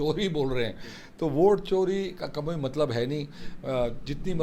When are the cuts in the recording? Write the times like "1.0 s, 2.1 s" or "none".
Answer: none